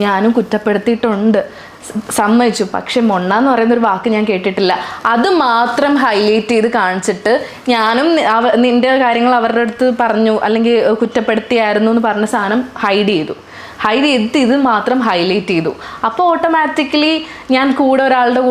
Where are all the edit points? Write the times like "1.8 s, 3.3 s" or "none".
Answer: none